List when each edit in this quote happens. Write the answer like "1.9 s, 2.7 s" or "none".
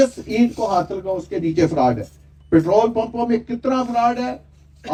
none